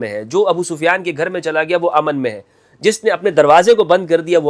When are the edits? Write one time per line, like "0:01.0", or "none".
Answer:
none